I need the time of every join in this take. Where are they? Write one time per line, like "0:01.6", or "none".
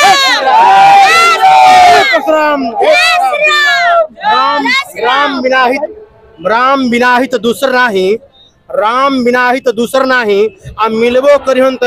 none